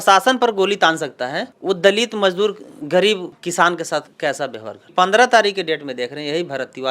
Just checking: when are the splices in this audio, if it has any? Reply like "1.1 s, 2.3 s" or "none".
4.9 s

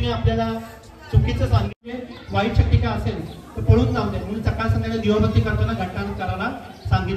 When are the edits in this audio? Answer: 1.8 s

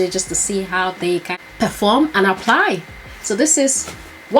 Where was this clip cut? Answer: 1.3 s

